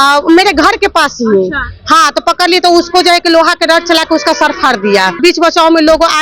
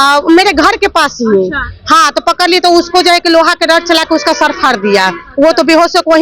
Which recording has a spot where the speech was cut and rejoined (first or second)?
first